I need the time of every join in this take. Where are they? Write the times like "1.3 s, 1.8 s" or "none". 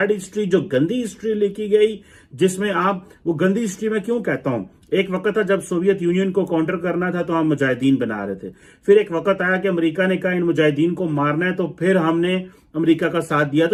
none